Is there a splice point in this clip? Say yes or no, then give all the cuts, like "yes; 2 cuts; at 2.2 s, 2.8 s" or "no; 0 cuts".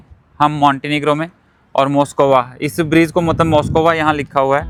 no; 0 cuts